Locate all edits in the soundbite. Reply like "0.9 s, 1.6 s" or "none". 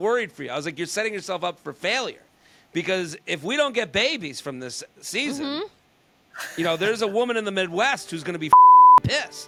none